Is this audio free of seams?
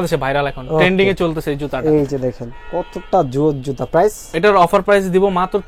yes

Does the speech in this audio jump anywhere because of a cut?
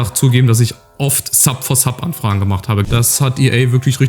yes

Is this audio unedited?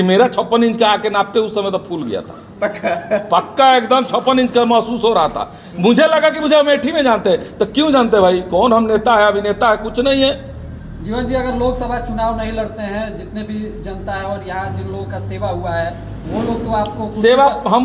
yes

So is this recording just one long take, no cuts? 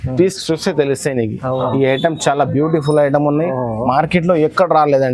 no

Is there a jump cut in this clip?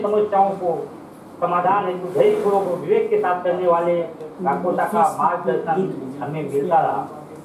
no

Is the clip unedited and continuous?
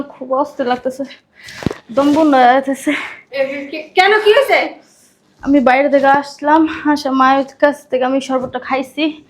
yes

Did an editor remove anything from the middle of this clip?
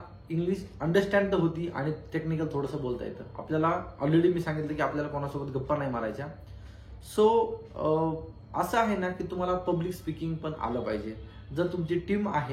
no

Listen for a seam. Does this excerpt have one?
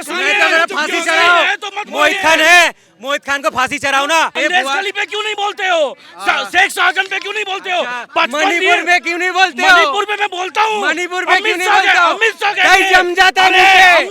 yes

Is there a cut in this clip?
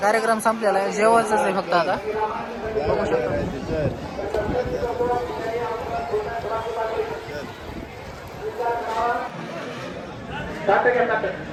no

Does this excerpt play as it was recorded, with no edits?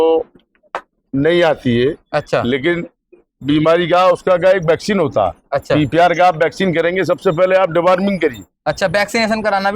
yes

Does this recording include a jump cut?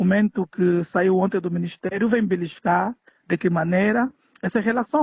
no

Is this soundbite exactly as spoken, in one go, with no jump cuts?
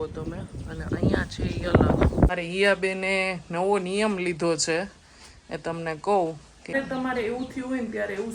no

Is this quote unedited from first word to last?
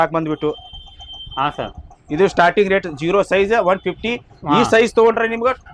yes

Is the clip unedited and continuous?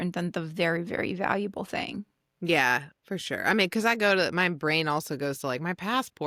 yes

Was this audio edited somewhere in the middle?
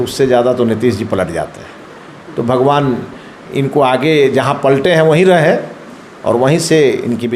no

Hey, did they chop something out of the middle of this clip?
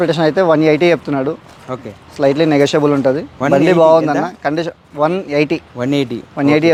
no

